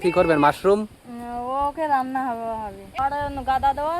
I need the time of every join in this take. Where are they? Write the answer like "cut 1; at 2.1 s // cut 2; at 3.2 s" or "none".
cut 1; at 2.8 s